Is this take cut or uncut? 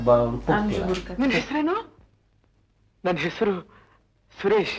cut